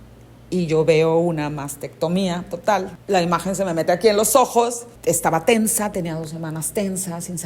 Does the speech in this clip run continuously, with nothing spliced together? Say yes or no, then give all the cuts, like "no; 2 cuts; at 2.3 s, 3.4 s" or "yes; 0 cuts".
no; 2 cuts; at 3.0 s, 4.9 s